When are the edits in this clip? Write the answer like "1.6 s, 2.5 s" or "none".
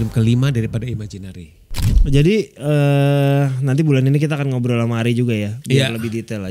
none

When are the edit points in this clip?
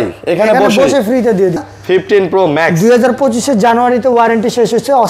1.7 s

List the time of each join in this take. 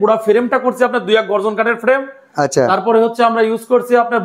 none

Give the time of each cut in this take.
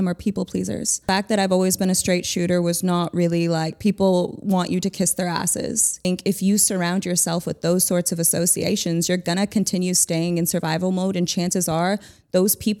1.0 s, 6.0 s

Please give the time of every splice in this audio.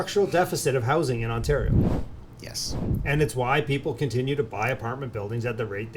none

